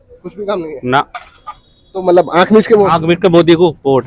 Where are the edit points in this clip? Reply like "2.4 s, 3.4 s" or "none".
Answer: none